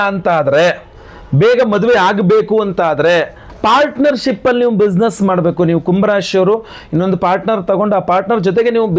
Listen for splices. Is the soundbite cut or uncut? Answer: cut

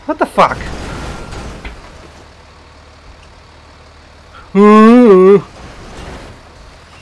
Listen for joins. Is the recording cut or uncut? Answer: uncut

